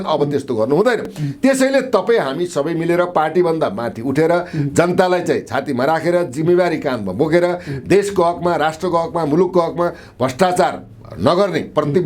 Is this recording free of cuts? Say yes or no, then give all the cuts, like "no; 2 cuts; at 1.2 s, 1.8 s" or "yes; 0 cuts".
yes; 0 cuts